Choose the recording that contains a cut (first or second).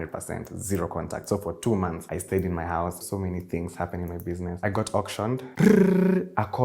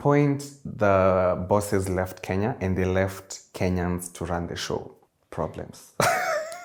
first